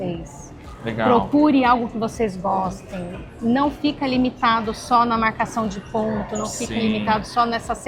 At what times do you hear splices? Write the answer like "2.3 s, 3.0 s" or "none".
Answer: none

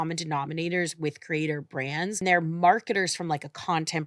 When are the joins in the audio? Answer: 2.2 s

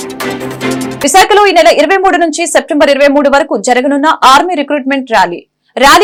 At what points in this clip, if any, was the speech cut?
none

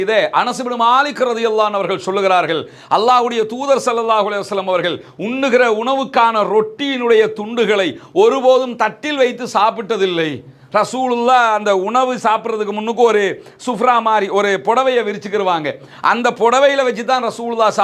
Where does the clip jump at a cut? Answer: none

